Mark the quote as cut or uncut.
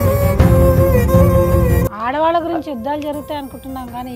cut